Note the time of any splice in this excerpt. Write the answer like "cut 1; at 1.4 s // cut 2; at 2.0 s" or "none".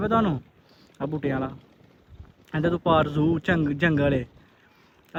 none

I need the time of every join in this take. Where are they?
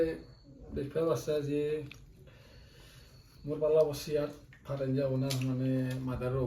none

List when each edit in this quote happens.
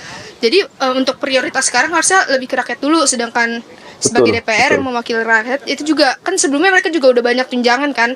none

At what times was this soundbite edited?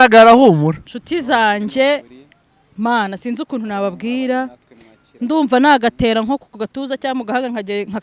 none

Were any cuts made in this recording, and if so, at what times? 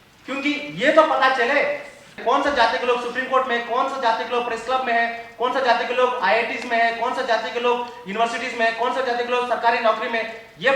cut 1; at 2.1 s

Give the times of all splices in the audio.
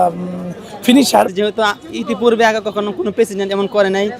cut 1; at 1.3 s

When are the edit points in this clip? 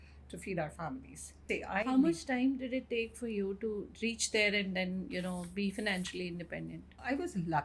cut 1; at 1.4 s

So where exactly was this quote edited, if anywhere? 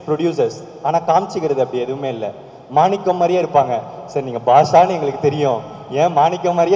none

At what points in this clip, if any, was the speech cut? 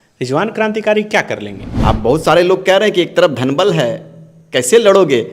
cut 1; at 1.7 s

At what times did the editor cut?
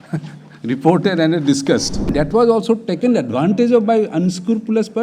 cut 1; at 2.1 s

